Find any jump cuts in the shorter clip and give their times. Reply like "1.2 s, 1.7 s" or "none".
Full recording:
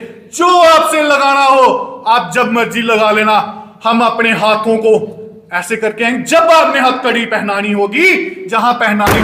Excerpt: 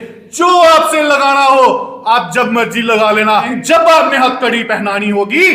3.5 s